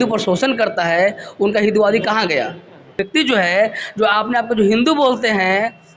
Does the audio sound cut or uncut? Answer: cut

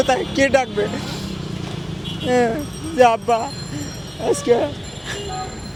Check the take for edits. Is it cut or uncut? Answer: uncut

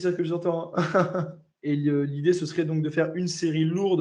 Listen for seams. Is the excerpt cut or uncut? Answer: cut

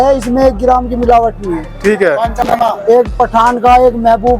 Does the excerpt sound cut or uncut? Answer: cut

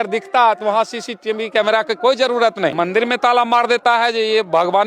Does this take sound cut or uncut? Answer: cut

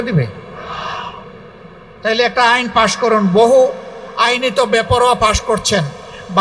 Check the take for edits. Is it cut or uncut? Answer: uncut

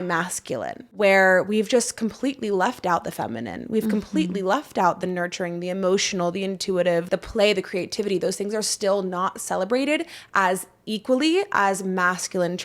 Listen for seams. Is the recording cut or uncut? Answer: cut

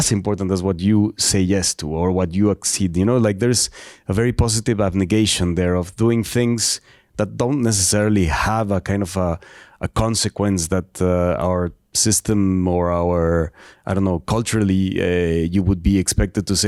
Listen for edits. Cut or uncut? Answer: uncut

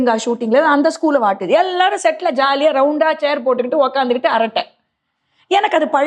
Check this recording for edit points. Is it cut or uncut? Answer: uncut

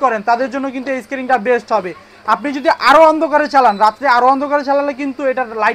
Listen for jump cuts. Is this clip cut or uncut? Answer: uncut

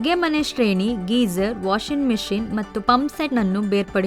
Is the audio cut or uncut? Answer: cut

